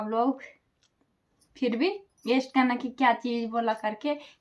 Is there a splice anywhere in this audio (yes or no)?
no